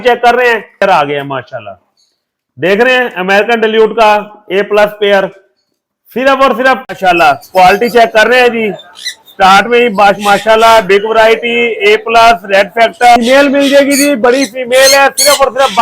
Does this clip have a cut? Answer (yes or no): yes